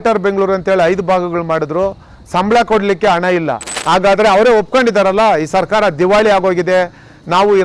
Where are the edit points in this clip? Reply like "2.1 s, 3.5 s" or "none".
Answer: 3.7 s